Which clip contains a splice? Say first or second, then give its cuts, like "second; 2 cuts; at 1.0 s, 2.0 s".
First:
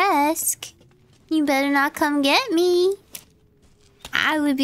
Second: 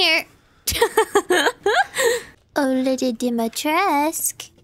second; 1 cut; at 2.4 s